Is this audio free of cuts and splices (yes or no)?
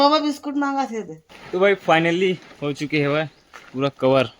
no